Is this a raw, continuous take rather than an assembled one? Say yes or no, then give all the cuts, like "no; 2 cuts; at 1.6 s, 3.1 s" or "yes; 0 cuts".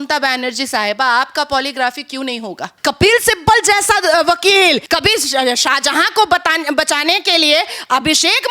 no; 2 cuts; at 2.7 s, 4.8 s